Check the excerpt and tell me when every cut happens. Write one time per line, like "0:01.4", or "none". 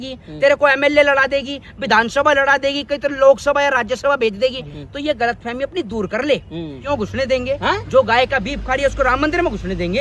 0:06.8